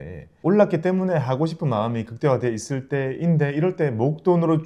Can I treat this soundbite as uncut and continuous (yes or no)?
yes